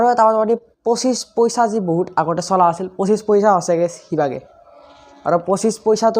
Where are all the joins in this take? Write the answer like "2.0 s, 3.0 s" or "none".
none